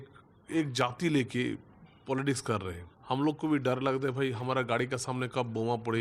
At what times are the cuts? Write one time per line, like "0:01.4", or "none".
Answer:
0:02.9